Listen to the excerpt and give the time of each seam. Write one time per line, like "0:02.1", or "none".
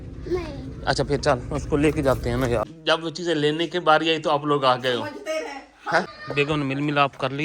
0:02.7
0:06.2